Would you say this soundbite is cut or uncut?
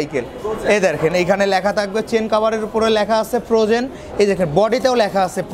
uncut